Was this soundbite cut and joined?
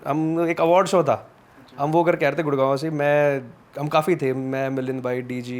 no; 0 cuts

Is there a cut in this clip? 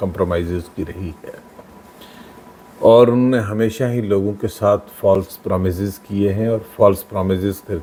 no; 0 cuts

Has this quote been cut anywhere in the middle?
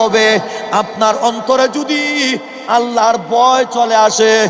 no; 0 cuts

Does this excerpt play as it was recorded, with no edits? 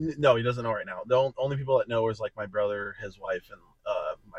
yes; 0 cuts

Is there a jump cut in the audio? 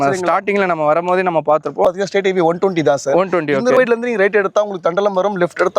yes; 2 cuts; at 1.8 s, 3.8 s

